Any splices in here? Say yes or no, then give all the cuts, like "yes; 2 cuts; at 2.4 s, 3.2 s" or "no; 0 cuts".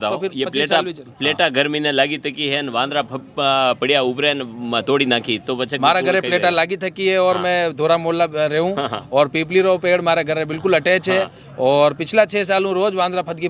no; 0 cuts